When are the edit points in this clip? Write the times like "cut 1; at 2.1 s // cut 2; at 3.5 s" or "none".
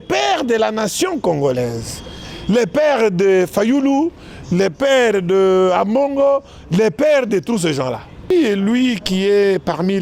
cut 1; at 8.3 s